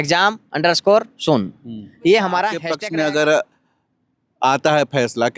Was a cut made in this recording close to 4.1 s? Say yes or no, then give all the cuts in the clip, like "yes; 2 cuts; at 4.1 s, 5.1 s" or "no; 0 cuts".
no; 1 cut; at 2.7 s